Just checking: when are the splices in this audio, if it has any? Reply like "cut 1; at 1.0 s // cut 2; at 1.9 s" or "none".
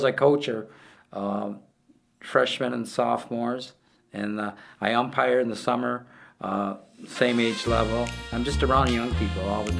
none